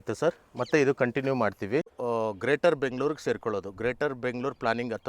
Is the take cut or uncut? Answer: cut